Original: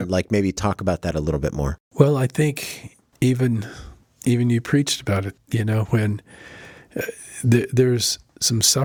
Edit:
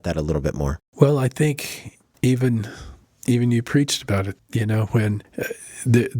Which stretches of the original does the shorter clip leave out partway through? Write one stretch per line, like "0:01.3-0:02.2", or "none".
0:06.2-0:06.8